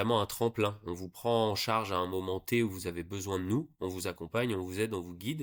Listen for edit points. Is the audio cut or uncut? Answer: uncut